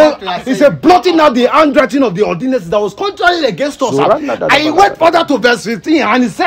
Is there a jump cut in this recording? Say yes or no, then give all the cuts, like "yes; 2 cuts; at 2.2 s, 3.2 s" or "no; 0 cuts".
no; 0 cuts